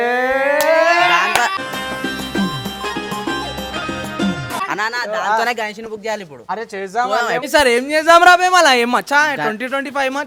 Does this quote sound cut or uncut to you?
uncut